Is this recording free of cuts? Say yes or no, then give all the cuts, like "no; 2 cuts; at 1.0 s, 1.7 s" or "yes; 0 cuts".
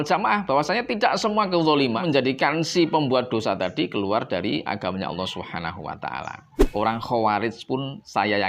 no; 2 cuts; at 2.0 s, 6.5 s